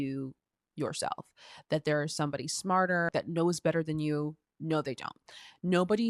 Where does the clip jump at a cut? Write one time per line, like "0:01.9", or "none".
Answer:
0:03.1